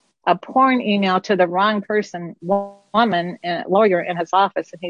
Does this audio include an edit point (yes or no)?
no